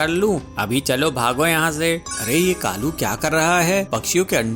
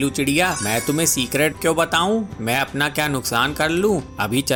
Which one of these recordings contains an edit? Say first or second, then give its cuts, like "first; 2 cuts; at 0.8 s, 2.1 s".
first; 1 cut; at 2.2 s